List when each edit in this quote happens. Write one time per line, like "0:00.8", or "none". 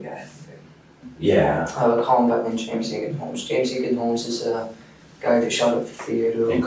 0:00.9

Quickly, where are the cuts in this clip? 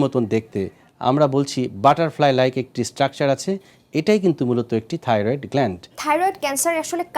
0:05.9

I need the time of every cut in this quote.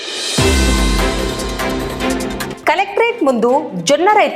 0:02.5

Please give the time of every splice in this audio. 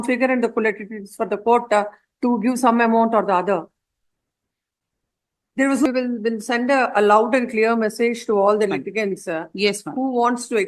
0:05.9

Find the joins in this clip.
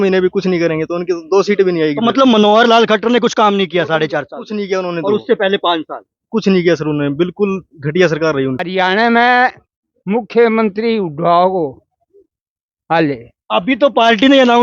0:08.6

